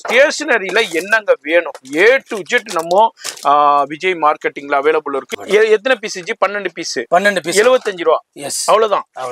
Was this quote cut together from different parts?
yes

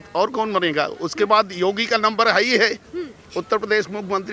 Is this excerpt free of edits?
yes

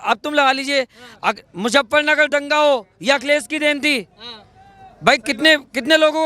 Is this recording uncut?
yes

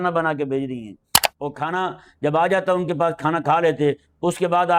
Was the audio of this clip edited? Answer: no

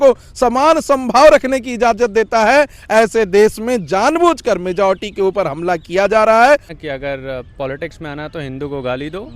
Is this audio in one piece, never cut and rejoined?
no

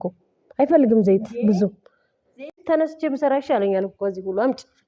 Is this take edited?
yes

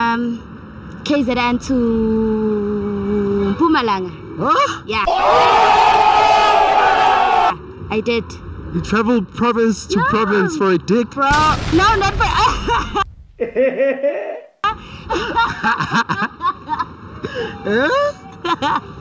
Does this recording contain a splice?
no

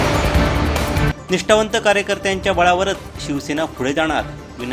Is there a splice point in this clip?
no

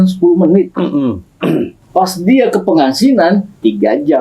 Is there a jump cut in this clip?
yes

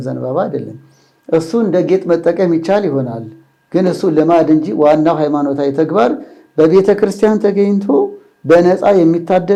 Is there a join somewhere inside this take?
no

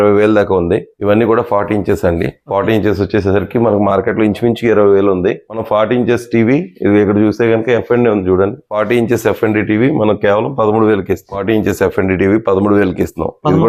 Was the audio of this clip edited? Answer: no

